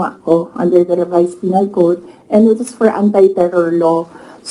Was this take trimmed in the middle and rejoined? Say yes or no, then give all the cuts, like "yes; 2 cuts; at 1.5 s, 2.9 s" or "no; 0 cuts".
no; 0 cuts